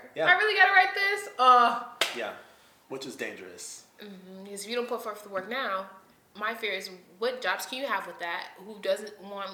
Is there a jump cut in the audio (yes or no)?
no